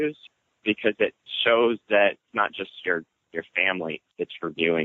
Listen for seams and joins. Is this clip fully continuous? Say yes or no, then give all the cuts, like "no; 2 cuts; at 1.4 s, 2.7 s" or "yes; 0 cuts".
no; 3 cuts; at 1.3 s, 2.3 s, 4.1 s